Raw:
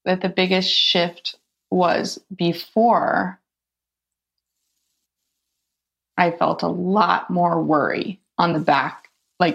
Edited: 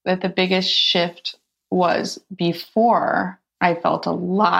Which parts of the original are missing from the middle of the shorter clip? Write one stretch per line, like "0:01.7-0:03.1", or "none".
0:03.4-0:06.0